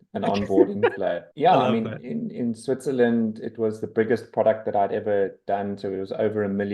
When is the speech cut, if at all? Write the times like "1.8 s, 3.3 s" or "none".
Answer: 1.3 s, 2.1 s